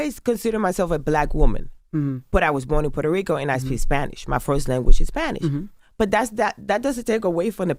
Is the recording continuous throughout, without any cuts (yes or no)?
yes